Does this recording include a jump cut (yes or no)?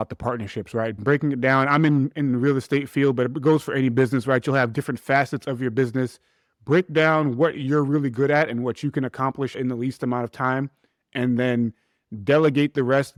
no